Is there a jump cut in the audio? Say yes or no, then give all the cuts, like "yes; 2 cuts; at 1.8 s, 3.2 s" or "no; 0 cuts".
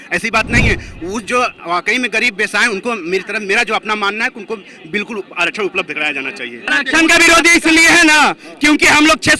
yes; 1 cut; at 6.8 s